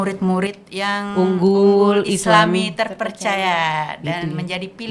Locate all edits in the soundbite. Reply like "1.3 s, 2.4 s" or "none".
none